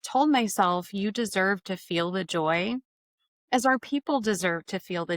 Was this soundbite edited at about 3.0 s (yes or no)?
no